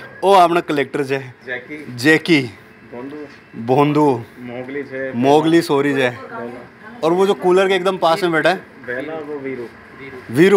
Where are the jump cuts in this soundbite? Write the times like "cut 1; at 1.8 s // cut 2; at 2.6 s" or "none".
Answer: none